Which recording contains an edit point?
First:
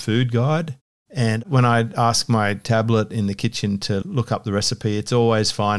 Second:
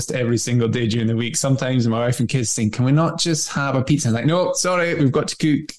first; 2 cuts; at 1.4 s, 4.0 s

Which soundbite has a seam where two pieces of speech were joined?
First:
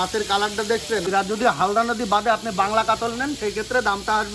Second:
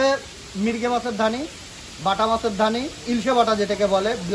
first; 1 cut; at 1.1 s

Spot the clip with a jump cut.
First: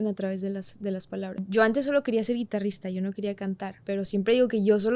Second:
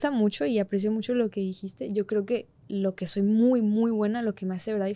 first; 2 cuts; at 1.4 s, 3.7 s

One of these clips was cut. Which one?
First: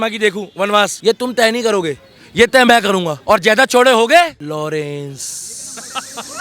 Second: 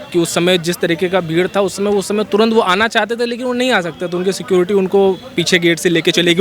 first; 3 cuts; at 0.9 s, 3.1 s, 4.4 s

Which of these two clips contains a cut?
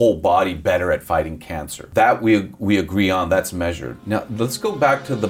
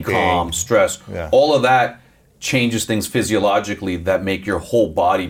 first; 2 cuts; at 1.9 s, 3.9 s

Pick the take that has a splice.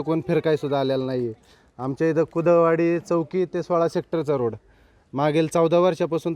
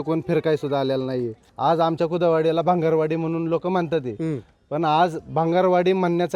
second; 1 cut; at 1.4 s

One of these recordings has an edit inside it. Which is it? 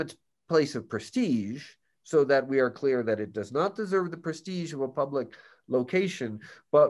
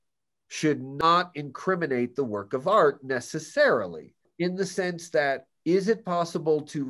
second; 2 cuts; at 1.0 s, 4.2 s

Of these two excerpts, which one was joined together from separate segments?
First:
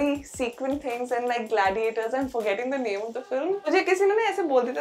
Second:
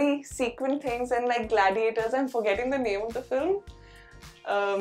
first; 1 cut; at 3.7 s

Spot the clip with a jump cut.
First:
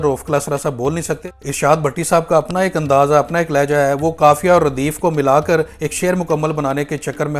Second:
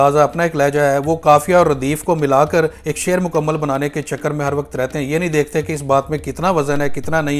first; 1 cut; at 1.4 s

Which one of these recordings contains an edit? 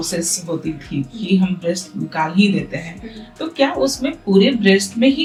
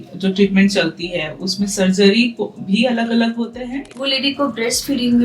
second; 1 cut; at 3.9 s

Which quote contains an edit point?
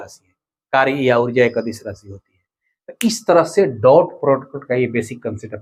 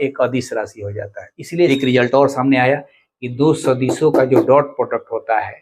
second; 1 cut; at 1.7 s

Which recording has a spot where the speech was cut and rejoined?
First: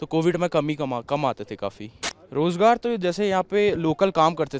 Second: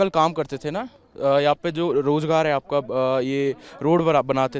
first; 1 cut; at 2.1 s

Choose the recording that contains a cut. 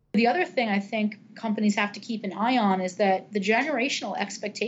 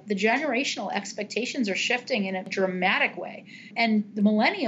second; 2 cuts; at 2.5 s, 3.7 s

